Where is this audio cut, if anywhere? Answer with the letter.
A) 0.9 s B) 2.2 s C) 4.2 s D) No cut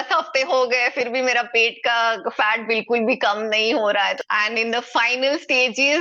C